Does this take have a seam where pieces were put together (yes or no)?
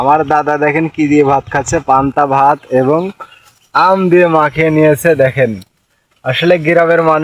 no